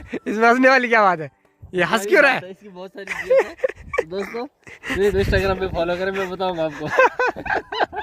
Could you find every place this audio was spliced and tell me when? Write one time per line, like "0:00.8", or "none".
none

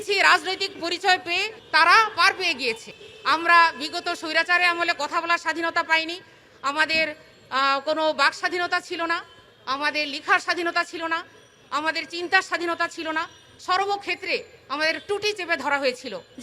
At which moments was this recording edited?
0:02.9

